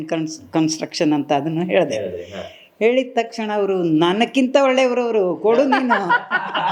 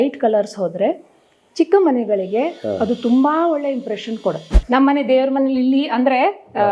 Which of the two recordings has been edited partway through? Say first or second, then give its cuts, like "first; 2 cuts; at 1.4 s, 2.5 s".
second; 1 cut; at 4.5 s